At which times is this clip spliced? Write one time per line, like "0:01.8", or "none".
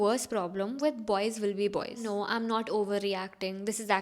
0:02.0